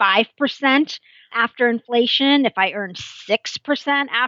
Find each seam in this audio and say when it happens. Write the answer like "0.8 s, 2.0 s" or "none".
1.4 s